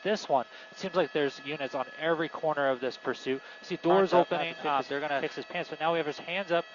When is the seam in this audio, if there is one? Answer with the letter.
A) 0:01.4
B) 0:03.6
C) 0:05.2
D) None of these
C